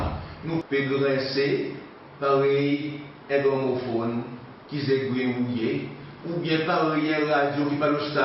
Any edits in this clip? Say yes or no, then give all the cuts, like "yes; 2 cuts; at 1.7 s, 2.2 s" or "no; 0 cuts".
no; 0 cuts